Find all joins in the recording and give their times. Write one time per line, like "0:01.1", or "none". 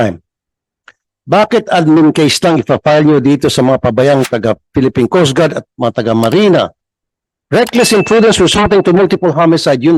none